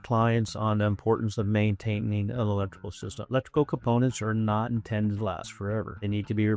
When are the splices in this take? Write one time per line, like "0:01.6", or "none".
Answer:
none